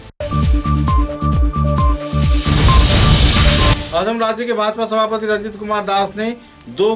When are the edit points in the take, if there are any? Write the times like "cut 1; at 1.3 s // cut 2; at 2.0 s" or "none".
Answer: none